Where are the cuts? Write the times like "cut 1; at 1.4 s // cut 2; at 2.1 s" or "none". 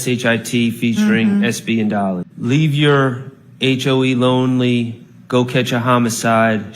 cut 1; at 2.3 s